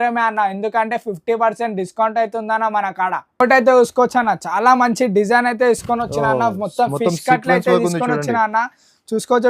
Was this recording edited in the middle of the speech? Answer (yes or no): no